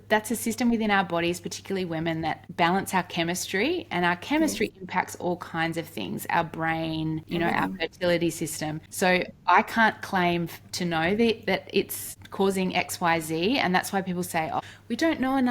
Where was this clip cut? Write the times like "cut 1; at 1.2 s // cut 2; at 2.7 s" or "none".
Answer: cut 1; at 2.4 s // cut 2; at 7.2 s // cut 3; at 14.6 s